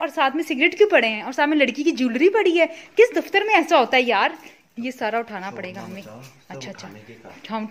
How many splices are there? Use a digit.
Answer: 0